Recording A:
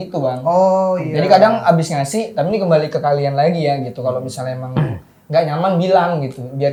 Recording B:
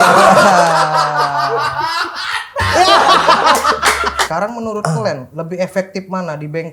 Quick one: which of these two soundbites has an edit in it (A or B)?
B